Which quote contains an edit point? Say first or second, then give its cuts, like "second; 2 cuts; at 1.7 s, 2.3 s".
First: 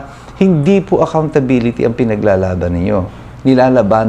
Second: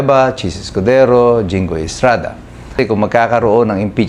second; 1 cut; at 2.8 s